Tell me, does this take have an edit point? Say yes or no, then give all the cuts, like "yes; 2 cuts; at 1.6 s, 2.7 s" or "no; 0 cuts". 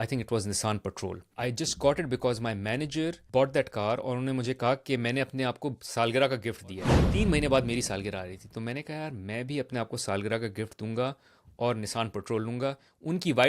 yes; 3 cuts; at 1.2 s, 3.2 s, 7.0 s